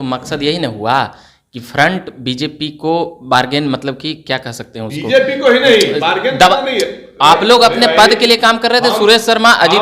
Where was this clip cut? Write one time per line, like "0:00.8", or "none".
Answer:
none